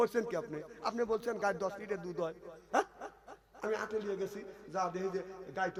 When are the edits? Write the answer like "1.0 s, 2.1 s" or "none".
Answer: none